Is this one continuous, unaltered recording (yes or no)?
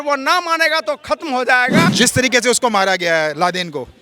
no